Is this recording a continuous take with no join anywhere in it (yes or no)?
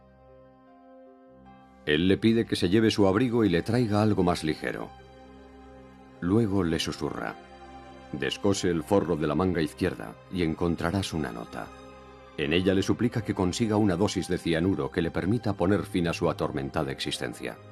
no